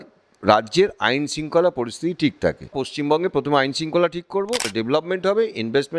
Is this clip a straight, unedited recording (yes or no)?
no